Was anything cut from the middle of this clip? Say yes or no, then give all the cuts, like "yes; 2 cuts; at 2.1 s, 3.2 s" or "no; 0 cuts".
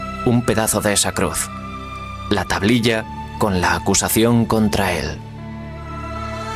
yes; 1 cut; at 4.9 s